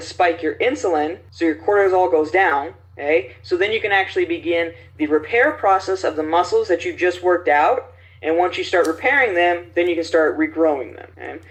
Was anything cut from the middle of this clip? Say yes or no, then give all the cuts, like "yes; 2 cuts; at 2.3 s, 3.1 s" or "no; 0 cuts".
no; 0 cuts